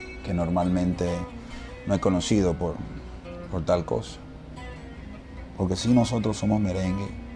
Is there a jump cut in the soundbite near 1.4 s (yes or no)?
no